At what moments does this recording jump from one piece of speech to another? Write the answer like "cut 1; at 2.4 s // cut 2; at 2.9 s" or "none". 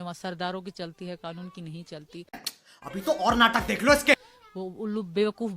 cut 1; at 2.5 s // cut 2; at 4.3 s